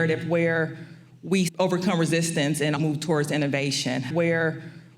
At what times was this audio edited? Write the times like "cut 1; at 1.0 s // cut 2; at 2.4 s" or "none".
cut 1; at 1.5 s // cut 2; at 2.8 s // cut 3; at 4.1 s